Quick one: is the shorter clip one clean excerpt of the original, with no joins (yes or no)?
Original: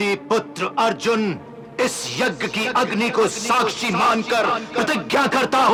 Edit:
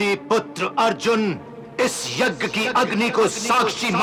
yes